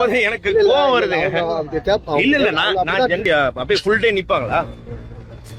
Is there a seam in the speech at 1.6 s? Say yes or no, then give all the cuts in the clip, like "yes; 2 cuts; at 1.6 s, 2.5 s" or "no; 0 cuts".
no; 1 cut; at 3.2 s